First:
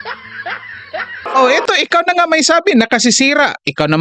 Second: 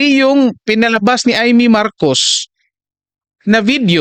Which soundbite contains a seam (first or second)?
first